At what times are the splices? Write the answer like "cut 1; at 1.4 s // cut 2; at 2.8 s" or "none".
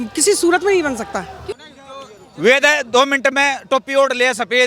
cut 1; at 1.6 s